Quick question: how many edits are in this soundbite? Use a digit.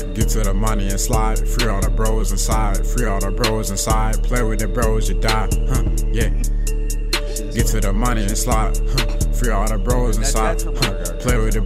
0